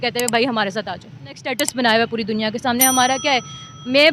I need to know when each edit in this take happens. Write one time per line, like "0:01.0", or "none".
0:01.5